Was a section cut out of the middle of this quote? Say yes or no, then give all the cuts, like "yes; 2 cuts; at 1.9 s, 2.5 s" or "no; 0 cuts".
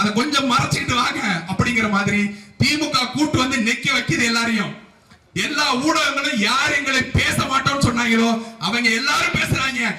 yes; 1 cut; at 5.2 s